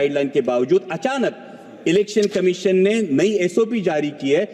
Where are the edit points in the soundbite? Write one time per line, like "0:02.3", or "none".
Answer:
none